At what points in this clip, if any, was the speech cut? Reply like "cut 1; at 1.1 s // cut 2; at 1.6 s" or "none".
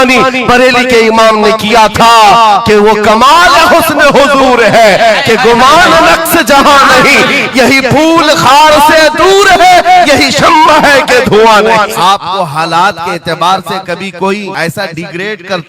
cut 1; at 11.9 s // cut 2; at 14.5 s